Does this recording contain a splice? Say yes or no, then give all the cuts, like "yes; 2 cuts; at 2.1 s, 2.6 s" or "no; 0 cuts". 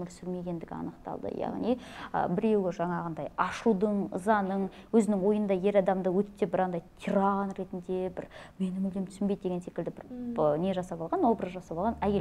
no; 0 cuts